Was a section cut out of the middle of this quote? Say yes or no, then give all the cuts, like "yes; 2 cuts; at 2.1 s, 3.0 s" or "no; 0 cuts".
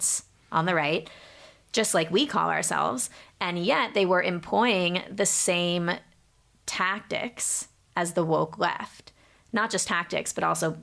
no; 0 cuts